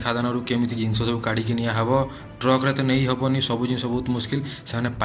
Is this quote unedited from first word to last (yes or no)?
yes